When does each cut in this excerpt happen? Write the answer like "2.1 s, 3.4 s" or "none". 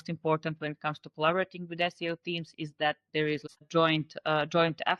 3.4 s

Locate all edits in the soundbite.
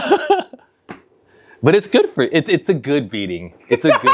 none

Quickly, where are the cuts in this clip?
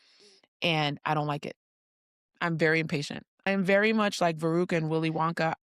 3.4 s

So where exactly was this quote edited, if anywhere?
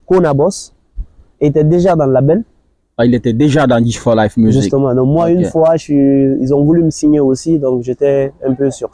none

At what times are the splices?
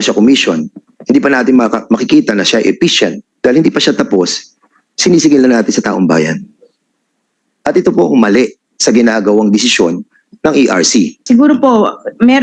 11.2 s

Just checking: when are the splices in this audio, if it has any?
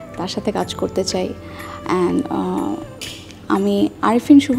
none

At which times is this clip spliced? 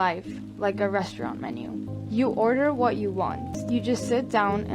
1.9 s, 3.5 s

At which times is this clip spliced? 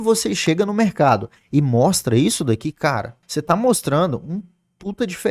3.2 s

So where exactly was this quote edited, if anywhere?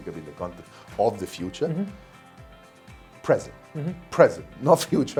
none

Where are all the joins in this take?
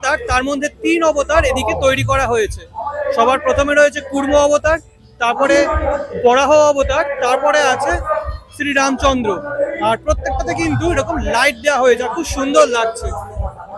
none

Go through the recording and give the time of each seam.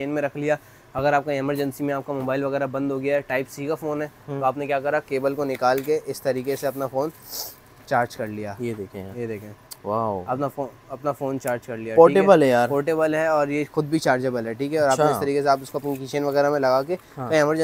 none

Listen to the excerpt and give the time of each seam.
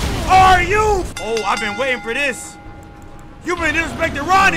1.1 s

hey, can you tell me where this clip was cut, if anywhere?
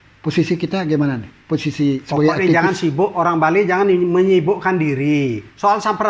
none

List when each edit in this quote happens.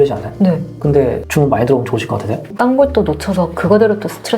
1.0 s, 2.5 s

